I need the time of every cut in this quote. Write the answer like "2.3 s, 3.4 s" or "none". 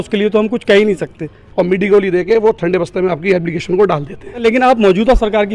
1.4 s, 4.4 s